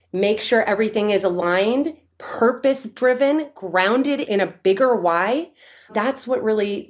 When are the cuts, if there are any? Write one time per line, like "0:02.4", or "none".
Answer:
0:04.2

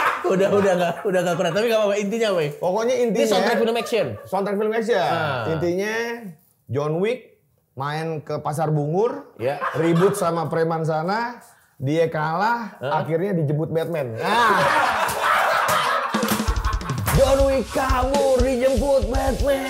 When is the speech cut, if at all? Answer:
none

